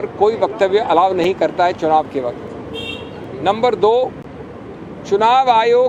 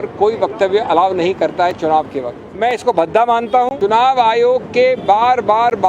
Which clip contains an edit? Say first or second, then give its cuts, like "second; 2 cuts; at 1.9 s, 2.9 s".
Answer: second; 2 cuts; at 2.4 s, 3.7 s